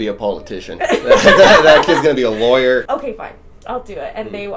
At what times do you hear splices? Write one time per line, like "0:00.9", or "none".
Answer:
0:02.9